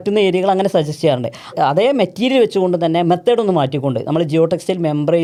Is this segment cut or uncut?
uncut